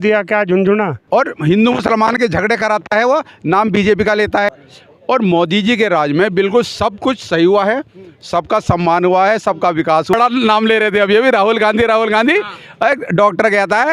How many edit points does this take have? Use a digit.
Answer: 3